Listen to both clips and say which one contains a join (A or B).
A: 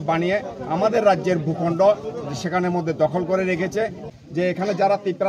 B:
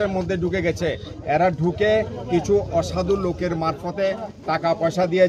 A